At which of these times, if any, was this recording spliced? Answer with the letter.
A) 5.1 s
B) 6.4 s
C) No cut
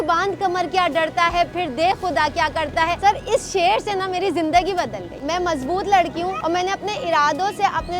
A